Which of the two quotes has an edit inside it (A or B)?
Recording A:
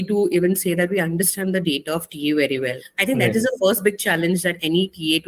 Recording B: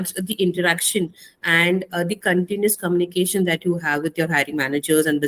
A